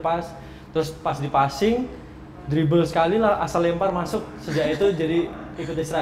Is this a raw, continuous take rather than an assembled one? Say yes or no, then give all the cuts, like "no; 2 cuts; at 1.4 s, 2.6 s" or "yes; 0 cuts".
yes; 0 cuts